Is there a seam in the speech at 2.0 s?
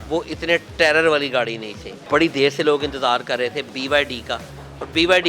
yes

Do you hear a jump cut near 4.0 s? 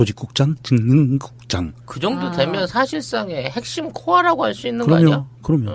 no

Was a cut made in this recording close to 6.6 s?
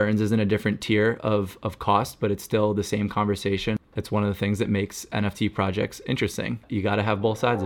yes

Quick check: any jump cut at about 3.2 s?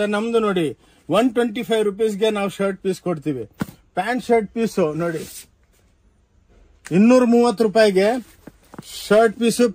no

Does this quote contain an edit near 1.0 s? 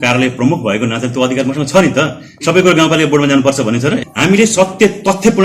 no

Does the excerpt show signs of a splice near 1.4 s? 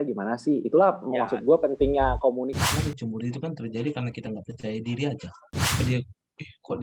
no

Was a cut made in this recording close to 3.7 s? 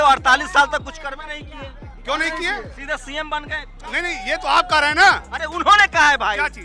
yes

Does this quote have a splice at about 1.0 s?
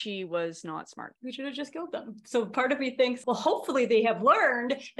yes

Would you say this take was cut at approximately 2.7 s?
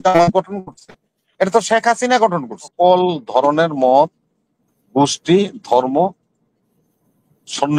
yes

